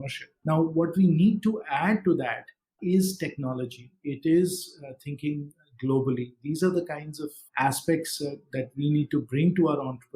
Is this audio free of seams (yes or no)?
yes